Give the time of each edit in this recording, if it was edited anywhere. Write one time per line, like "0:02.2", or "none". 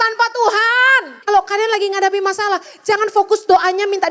0:01.1